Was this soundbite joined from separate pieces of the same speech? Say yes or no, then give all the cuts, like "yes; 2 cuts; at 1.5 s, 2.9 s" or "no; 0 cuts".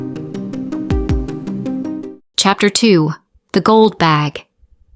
yes; 1 cut; at 2.2 s